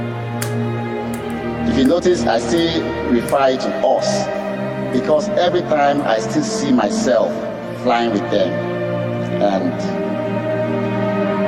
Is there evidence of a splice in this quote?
no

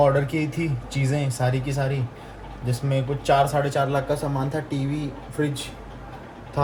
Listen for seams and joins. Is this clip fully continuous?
yes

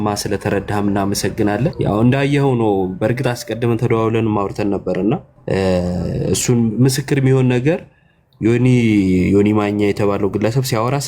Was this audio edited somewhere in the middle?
yes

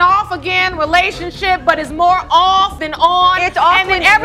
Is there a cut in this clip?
no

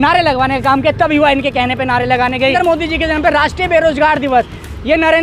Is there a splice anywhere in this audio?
yes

